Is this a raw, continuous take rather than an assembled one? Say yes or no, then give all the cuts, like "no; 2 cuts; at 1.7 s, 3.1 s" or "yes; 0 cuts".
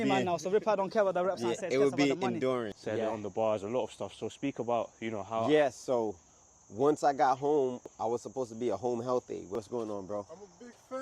no; 3 cuts; at 2.7 s, 7.9 s, 9.5 s